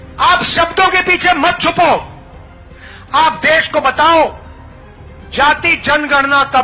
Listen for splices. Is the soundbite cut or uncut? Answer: uncut